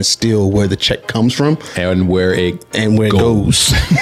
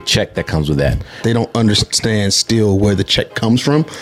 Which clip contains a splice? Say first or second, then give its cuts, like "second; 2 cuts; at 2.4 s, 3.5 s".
second; 1 cut; at 1.2 s